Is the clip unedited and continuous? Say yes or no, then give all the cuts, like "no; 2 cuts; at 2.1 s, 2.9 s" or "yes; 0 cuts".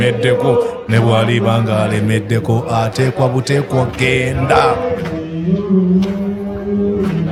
yes; 0 cuts